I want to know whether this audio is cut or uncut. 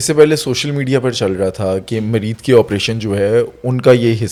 uncut